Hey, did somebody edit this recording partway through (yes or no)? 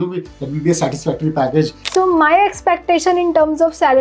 yes